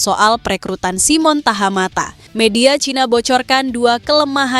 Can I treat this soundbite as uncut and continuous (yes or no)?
no